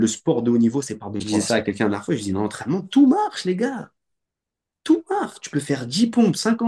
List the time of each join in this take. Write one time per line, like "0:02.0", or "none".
0:01.2